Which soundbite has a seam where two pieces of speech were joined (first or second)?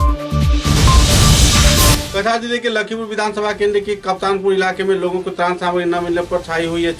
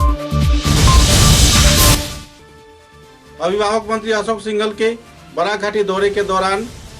second